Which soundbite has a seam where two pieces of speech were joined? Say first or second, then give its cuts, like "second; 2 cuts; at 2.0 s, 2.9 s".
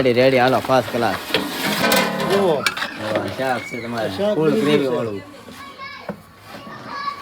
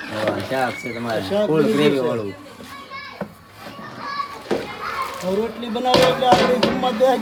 first; 1 cut; at 1.8 s